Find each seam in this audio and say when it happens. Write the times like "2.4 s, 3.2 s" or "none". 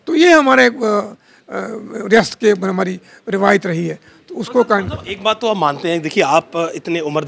none